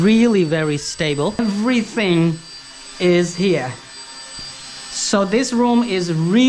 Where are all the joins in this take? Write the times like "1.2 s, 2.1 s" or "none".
1.4 s